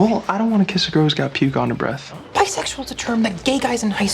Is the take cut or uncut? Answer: cut